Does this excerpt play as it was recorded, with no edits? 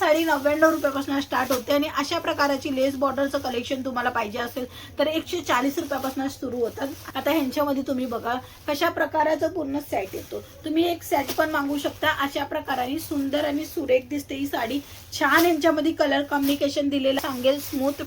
no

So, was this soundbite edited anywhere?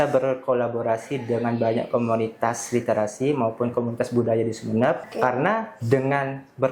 yes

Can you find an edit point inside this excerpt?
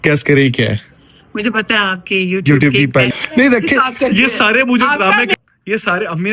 yes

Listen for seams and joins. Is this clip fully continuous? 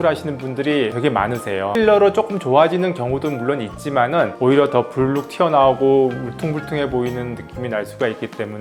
yes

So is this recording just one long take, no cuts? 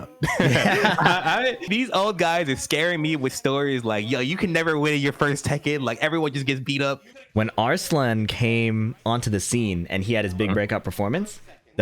no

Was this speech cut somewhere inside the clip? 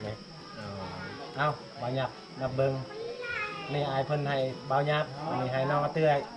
no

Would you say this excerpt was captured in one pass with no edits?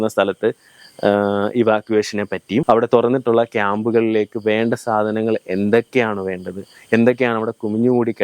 yes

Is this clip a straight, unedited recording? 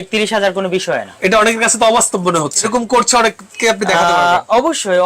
no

